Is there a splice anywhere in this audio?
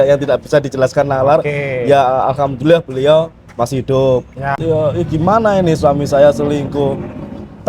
yes; 1 cut; at 4.6 s

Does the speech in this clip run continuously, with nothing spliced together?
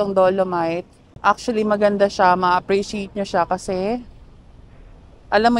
no; 1 cut; at 0.9 s

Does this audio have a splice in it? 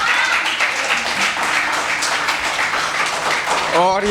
no; 0 cuts

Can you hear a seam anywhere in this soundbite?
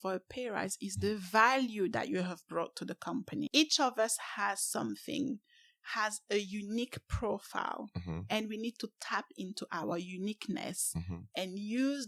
yes; 1 cut; at 3.5 s

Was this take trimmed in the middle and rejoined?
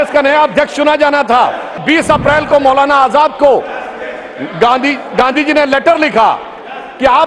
yes; 1 cut; at 1.8 s

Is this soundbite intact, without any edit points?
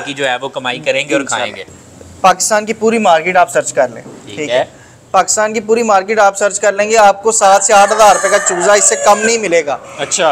no; 1 cut; at 1.7 s

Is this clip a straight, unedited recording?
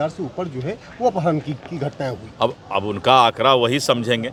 yes; 0 cuts

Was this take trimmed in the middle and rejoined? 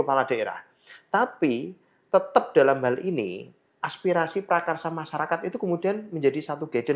no; 0 cuts

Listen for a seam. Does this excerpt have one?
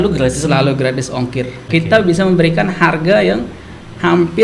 yes; 1 cut; at 1.6 s

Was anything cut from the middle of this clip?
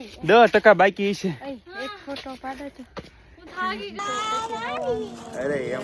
yes; 1 cut; at 4.0 s

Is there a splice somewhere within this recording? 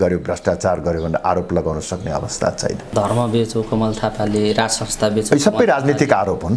yes; 1 cut; at 2.9 s

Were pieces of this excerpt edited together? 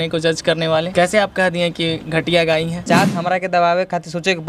yes; 2 cuts; at 0.9 s, 2.9 s

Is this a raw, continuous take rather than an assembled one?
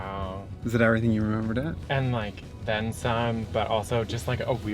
no; 1 cut; at 1.8 s

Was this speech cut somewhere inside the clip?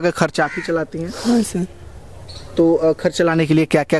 no; 0 cuts

